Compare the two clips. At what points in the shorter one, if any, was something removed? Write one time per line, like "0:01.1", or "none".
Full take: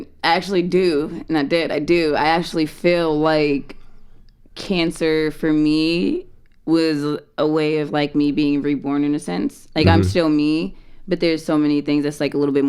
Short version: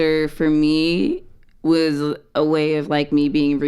none